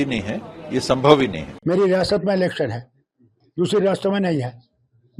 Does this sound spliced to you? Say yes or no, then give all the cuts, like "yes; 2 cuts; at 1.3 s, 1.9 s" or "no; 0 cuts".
yes; 1 cut; at 1.5 s